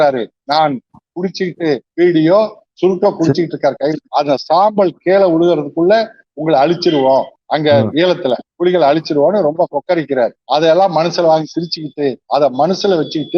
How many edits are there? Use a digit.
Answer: 3